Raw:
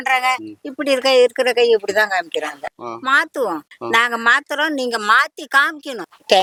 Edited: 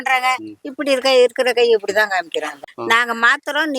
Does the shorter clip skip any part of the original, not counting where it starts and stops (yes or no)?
yes